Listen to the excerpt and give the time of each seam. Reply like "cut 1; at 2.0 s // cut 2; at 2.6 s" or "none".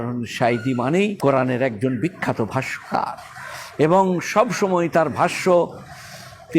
cut 1; at 1.2 s